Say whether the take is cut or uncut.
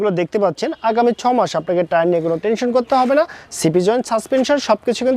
uncut